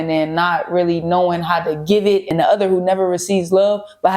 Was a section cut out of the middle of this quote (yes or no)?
yes